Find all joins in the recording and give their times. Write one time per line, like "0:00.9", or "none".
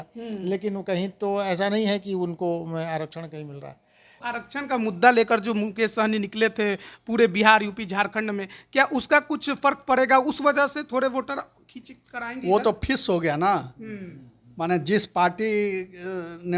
0:04.2